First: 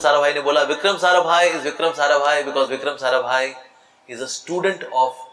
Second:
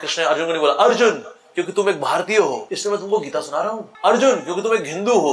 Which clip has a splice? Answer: second; 2 cuts; at 2.7 s, 3.9 s

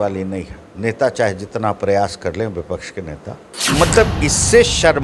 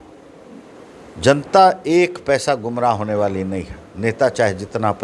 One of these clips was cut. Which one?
first; 1 cut; at 3.5 s

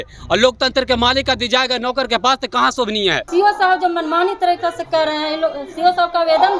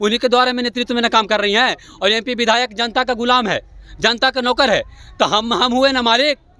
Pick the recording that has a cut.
first; 1 cut; at 3.3 s

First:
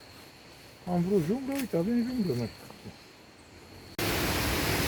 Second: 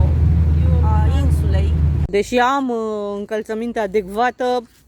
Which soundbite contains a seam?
second; 1 cut; at 2.0 s

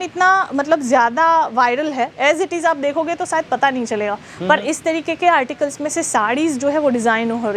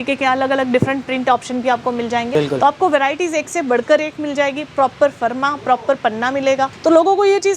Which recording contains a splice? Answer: second; 2 cuts; at 2.3 s, 6.7 s

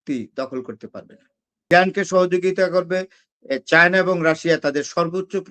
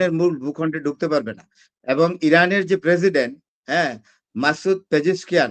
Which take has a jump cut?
first; 1 cut; at 1.7 s

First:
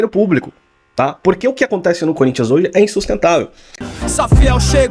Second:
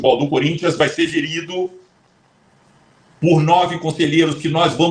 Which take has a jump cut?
first; 1 cut; at 3.7 s

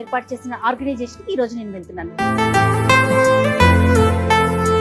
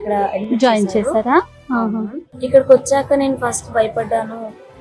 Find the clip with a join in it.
first; 1 cut; at 2.1 s

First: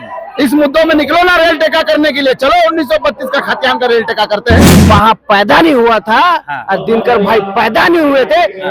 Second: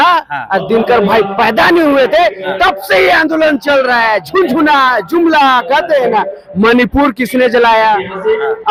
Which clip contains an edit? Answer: first; 1 cut; at 4.7 s

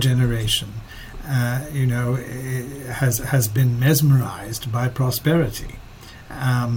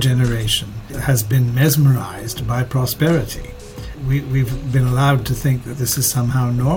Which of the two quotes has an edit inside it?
second; 2 cuts; at 1.0 s, 3.9 s

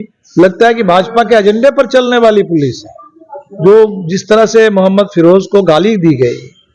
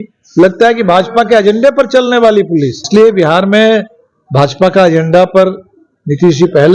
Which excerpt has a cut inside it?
second; 1 cut; at 2.8 s

